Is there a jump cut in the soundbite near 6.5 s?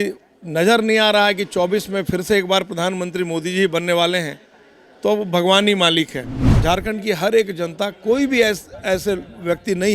yes; 1 cut; at 6.5 s

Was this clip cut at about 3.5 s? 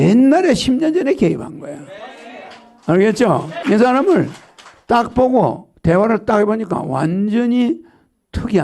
yes; 1 cut; at 3.5 s

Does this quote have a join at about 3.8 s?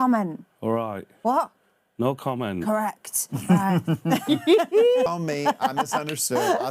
no; 1 cut; at 5.1 s

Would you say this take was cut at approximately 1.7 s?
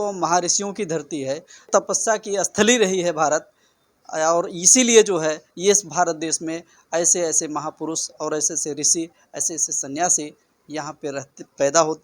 yes; 1 cut; at 1.7 s

